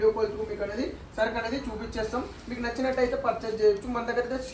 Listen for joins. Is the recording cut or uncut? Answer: uncut